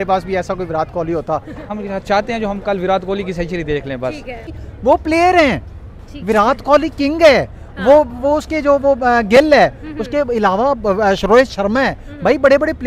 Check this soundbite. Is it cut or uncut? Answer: cut